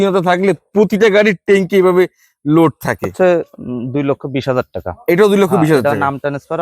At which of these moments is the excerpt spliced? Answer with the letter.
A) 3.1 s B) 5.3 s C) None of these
A